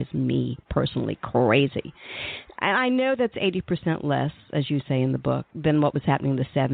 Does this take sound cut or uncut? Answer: cut